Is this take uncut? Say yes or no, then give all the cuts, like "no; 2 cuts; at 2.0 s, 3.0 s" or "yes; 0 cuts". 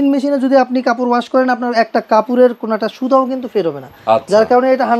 yes; 0 cuts